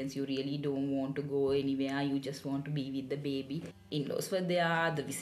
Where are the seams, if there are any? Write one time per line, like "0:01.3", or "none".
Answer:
0:03.7